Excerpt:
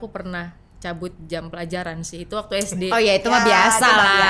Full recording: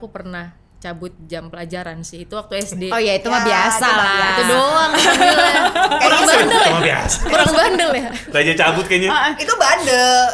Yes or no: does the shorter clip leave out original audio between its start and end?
no